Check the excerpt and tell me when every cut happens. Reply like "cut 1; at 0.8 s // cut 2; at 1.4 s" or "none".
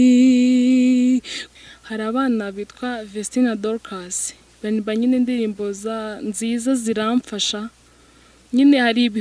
cut 1; at 1.4 s